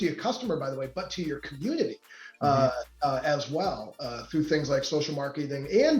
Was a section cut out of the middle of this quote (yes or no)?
no